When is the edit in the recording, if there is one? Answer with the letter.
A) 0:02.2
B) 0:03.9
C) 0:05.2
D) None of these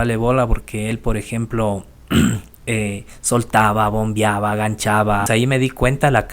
C